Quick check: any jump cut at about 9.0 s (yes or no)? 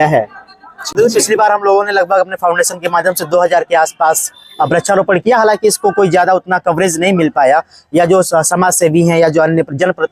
no